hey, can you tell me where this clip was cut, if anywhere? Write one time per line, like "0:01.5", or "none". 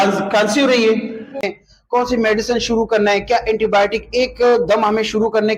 0:01.6